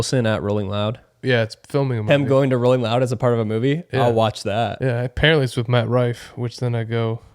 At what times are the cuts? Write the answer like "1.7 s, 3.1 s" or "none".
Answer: 1.2 s, 4.8 s